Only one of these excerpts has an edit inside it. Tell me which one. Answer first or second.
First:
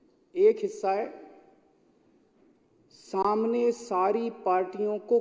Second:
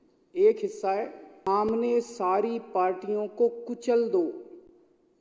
second